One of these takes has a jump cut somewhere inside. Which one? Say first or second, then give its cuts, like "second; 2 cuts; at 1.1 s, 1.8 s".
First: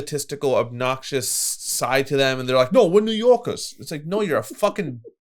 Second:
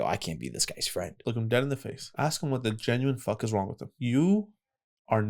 second; 3 cuts; at 1.1 s, 2.0 s, 3.9 s